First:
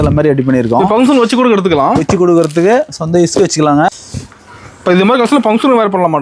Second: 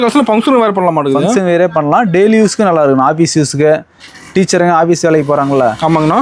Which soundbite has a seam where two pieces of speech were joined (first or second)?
first